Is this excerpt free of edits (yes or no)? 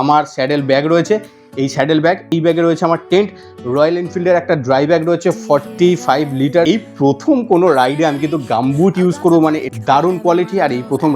no